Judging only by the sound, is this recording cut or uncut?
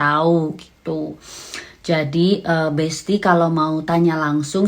uncut